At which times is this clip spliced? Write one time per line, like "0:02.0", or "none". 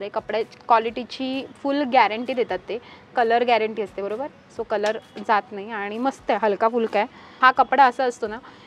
0:07.4